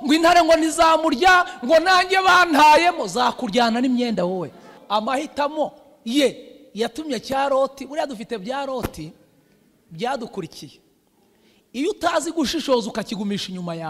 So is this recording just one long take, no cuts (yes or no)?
no